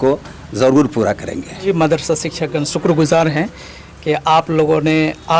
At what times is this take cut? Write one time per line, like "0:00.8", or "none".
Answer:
none